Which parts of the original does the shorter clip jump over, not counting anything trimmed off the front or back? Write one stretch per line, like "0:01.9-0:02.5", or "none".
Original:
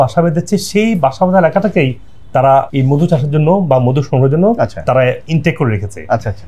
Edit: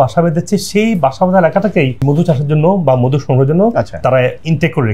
0:02.0-0:02.8